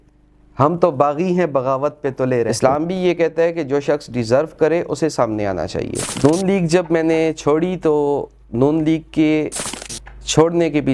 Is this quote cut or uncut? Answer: cut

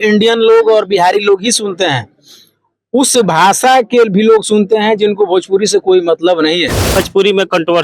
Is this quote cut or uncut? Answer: cut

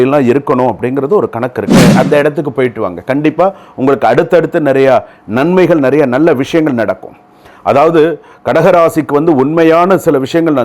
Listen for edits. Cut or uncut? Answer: cut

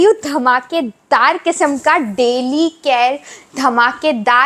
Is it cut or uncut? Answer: uncut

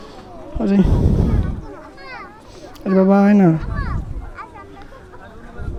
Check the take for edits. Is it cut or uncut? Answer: uncut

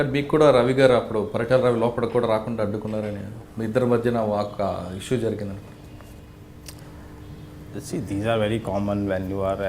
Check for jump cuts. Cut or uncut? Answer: uncut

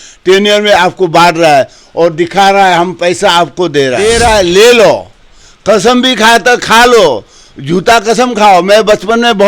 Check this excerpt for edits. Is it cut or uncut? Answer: cut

